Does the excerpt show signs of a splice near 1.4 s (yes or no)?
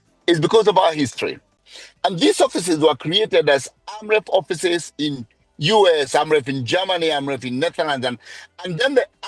yes